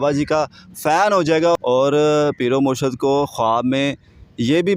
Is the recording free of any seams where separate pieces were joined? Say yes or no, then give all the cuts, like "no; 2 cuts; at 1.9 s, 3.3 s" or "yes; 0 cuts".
no; 1 cut; at 1.5 s